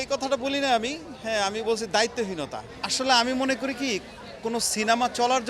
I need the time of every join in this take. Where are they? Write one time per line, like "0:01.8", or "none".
0:02.6